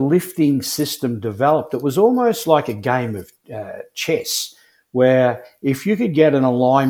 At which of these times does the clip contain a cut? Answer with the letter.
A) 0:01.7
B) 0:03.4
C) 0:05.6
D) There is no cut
D